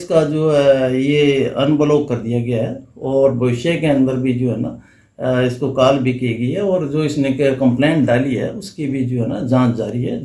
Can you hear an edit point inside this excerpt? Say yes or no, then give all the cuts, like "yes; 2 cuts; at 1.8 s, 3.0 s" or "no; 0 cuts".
no; 0 cuts